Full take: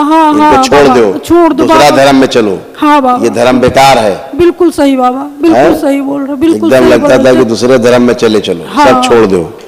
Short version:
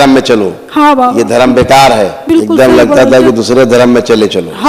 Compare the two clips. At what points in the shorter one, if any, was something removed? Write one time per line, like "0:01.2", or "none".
0:02.2